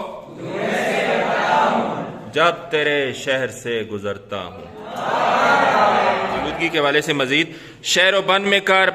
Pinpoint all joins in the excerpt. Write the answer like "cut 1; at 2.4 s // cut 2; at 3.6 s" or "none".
cut 1; at 6.5 s